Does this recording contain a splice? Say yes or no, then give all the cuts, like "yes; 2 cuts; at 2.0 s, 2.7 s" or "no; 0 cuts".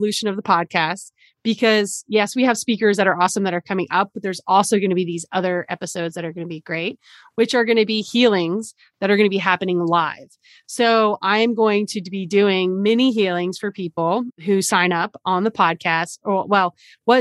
no; 0 cuts